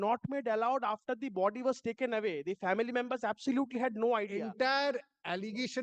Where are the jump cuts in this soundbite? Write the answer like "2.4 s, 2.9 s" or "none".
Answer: 4.3 s